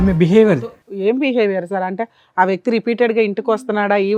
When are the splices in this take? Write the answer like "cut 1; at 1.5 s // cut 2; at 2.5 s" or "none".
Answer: none